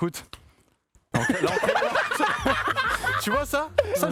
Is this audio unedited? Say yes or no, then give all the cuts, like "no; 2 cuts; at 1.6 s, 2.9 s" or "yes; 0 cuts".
yes; 0 cuts